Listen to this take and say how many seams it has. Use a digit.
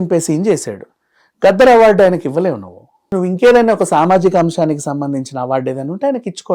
1